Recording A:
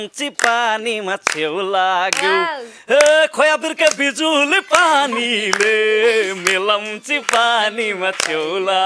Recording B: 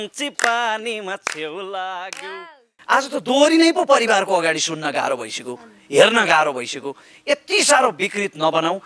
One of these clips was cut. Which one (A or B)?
B